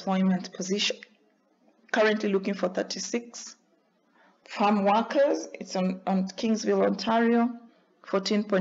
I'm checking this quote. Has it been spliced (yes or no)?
no